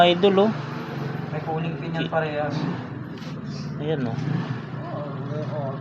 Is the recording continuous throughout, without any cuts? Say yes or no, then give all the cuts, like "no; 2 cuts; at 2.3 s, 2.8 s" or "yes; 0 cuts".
yes; 0 cuts